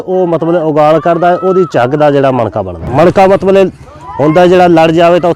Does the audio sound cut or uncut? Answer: cut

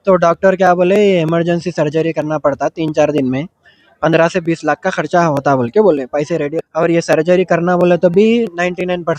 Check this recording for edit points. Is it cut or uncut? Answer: cut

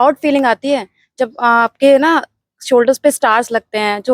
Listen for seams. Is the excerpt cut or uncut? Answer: uncut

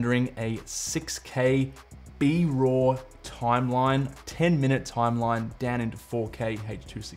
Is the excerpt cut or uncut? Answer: uncut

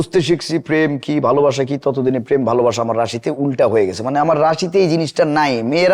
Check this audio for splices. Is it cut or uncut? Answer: uncut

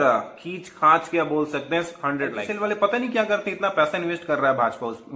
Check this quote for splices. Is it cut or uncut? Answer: cut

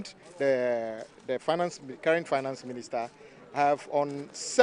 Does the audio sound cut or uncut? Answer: uncut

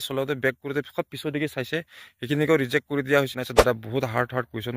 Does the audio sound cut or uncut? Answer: cut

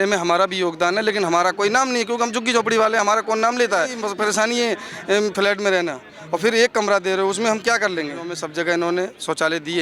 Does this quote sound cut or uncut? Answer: cut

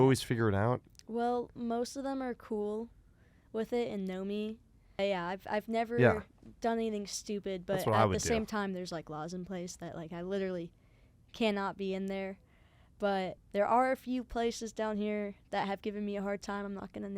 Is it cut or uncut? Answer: cut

